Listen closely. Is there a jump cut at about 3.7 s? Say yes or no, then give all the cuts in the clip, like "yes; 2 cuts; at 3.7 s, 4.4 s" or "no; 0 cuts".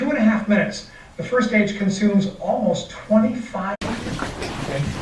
no; 0 cuts